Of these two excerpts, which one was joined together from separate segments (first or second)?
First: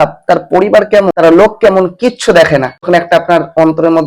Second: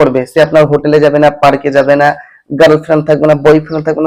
first